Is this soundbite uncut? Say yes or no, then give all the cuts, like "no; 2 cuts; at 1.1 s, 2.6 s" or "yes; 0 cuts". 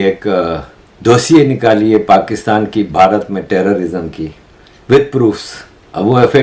yes; 0 cuts